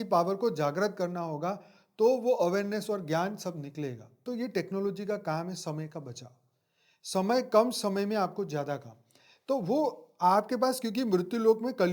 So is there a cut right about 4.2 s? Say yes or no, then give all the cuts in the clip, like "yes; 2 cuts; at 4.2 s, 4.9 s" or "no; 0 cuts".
yes; 1 cut; at 4.2 s